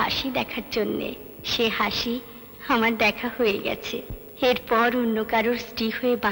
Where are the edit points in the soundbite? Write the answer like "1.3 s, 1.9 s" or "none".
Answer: none